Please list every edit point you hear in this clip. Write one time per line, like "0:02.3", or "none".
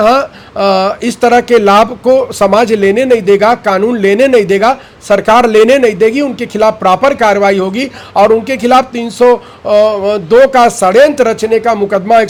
none